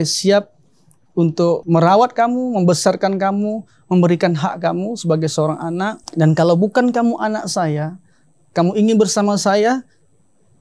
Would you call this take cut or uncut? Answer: cut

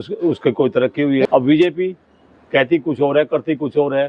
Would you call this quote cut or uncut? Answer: cut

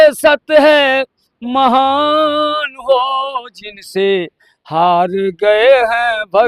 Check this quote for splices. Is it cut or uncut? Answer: uncut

